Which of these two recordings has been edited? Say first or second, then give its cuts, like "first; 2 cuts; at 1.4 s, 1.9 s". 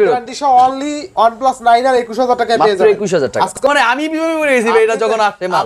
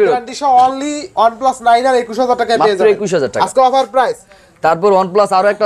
first; 1 cut; at 3.6 s